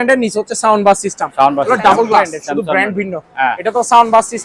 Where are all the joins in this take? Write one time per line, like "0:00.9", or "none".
0:02.4